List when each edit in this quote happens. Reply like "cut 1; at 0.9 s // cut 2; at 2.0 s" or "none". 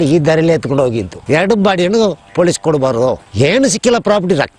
cut 1; at 1.0 s